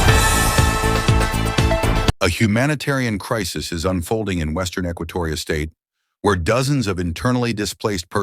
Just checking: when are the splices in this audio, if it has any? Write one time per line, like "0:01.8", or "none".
0:02.2